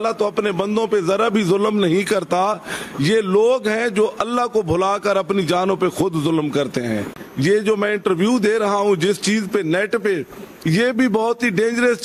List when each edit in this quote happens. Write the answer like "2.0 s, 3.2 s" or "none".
7.2 s